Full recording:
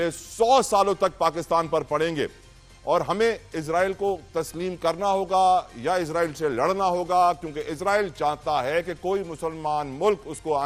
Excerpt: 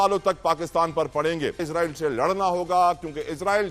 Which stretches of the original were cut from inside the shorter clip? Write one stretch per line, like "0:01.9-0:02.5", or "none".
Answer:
0:02.4-0:06.1